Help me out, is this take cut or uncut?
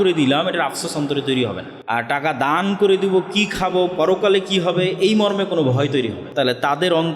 cut